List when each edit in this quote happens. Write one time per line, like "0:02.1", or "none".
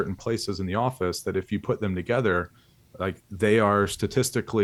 none